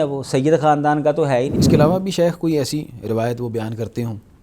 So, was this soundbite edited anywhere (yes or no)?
yes